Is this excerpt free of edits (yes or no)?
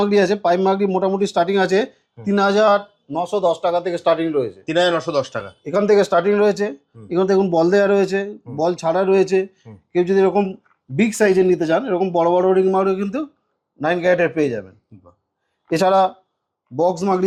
yes